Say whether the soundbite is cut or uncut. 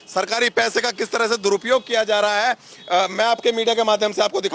uncut